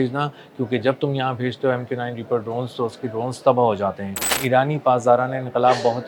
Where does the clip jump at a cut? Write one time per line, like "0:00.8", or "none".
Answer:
0:04.3